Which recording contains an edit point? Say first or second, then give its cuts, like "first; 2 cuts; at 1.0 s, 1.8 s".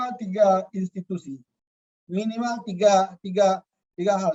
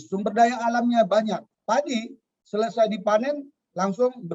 second; 1 cut; at 1.6 s